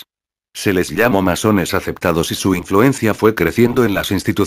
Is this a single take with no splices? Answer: no; 1 cut; at 3.0 s

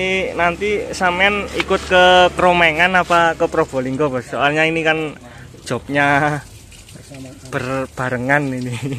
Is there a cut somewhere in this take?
no; 0 cuts

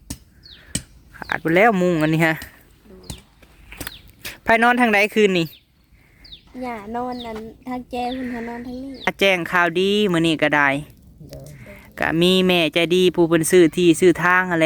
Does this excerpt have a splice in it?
yes; 1 cut; at 9.1 s

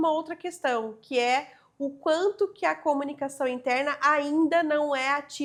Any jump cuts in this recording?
no; 0 cuts

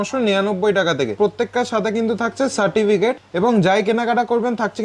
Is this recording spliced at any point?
yes; 2 cuts; at 1.2 s, 3.3 s

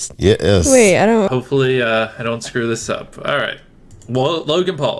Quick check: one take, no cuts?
no; 1 cut; at 1.3 s

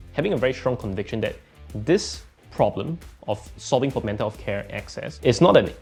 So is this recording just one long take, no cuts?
yes; 0 cuts

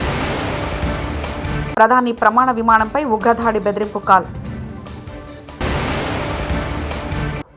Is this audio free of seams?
no; 1 cut; at 1.7 s

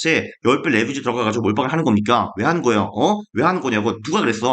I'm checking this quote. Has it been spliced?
no; 0 cuts

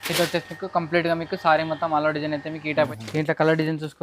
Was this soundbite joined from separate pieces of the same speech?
yes; 1 cut; at 2.9 s

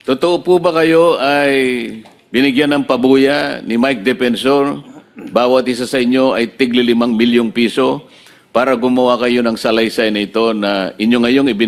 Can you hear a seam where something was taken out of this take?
no; 0 cuts

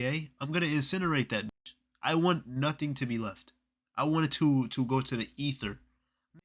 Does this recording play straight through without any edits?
yes; 0 cuts

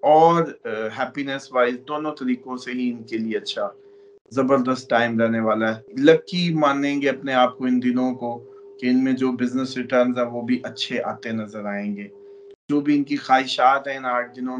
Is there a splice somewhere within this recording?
yes; 2 cuts; at 5.8 s, 12.6 s

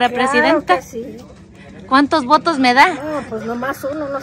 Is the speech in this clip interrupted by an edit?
no; 0 cuts

